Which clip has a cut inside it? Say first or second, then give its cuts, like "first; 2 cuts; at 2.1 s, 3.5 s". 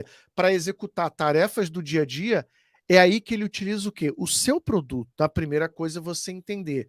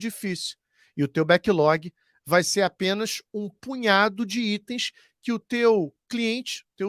first; 1 cut; at 5.0 s